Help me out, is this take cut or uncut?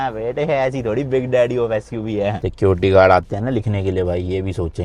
cut